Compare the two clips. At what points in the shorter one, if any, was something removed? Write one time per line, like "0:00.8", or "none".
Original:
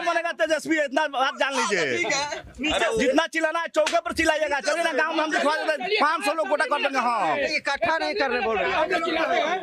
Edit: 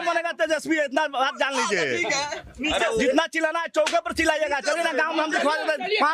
none